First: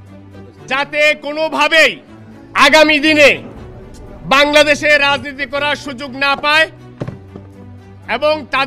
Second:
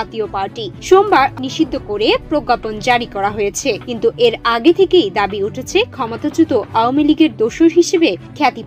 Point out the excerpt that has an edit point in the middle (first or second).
second